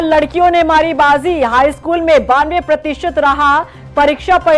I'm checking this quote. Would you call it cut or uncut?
uncut